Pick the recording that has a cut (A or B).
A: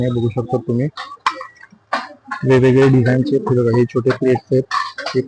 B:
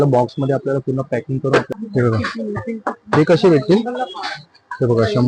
B